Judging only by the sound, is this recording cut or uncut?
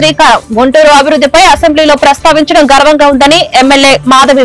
uncut